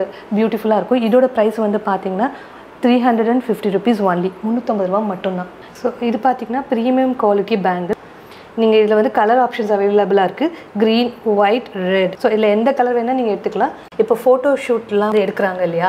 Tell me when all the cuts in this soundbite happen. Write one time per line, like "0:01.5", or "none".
0:05.6
0:08.0
0:13.9